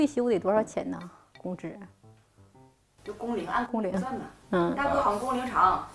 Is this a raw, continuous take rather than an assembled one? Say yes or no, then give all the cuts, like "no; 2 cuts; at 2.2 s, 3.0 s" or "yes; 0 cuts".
yes; 0 cuts